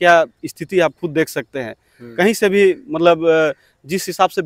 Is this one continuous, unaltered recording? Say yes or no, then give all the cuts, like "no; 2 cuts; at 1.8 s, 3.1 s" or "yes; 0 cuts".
yes; 0 cuts